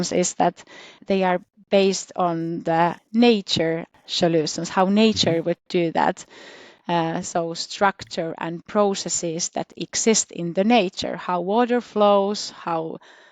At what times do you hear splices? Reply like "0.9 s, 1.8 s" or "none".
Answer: 1.0 s, 3.0 s, 4.0 s